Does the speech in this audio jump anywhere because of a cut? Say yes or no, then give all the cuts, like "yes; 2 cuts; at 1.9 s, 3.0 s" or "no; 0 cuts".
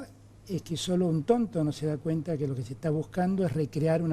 no; 0 cuts